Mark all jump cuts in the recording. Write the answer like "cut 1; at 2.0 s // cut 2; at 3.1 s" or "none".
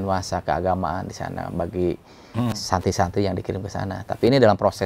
none